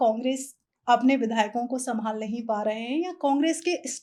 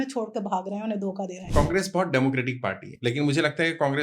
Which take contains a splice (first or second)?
second